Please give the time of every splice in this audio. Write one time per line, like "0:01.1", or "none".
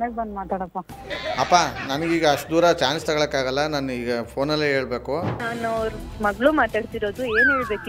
0:05.5